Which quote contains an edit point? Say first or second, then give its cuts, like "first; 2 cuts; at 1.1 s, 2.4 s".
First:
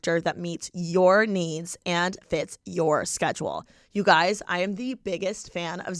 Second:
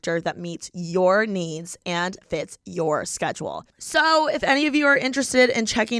second; 1 cut; at 3.7 s